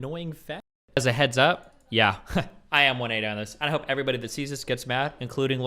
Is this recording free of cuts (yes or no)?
no